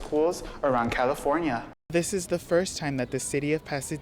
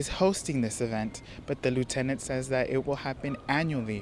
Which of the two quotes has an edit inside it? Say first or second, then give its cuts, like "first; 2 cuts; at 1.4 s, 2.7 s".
first; 1 cut; at 1.9 s